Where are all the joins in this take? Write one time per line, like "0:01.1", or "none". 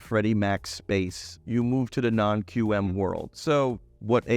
0:03.3